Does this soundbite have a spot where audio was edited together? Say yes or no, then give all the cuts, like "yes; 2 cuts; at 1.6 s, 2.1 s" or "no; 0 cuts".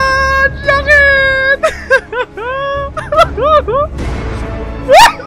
yes; 1 cut; at 2.9 s